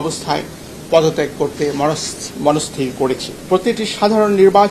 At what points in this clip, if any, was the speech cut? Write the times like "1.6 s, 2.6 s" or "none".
3.3 s